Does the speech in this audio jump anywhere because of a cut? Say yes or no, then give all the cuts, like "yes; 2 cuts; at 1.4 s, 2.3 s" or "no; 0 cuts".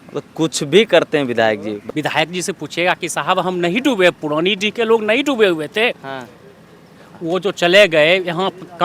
yes; 1 cut; at 1.8 s